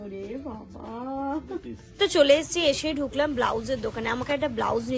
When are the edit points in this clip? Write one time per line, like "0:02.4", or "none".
0:02.0